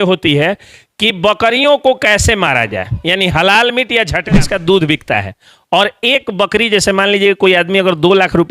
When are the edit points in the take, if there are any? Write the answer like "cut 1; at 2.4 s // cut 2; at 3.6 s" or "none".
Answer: cut 1; at 4.5 s